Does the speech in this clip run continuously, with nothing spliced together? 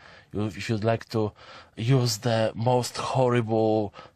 yes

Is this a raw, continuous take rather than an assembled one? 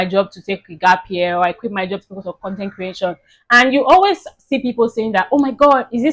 yes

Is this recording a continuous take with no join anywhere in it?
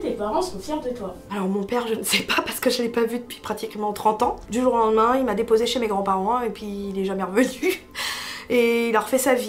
no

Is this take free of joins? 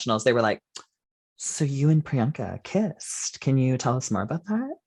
yes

